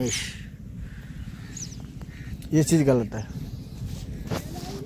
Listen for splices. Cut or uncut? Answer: uncut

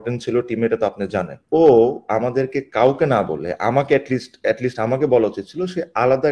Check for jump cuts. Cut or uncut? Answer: cut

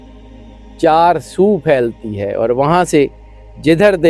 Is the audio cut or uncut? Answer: uncut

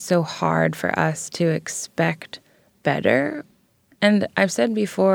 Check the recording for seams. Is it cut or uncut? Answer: cut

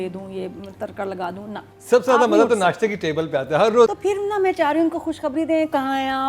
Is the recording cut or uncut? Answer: cut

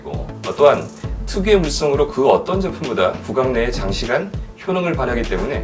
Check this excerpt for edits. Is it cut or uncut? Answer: uncut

